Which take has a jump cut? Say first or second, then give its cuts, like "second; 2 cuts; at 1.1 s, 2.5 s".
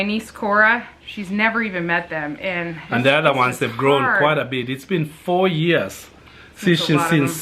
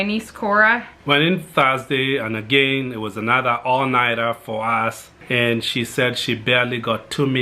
second; 2 cuts; at 0.9 s, 5.1 s